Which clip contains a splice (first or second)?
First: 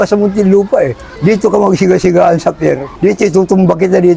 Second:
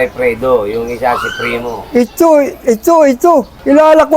first